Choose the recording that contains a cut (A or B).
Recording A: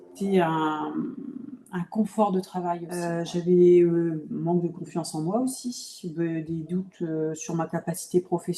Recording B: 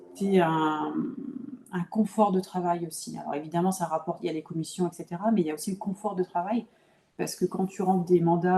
A